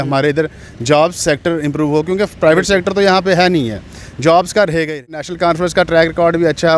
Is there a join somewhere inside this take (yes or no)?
yes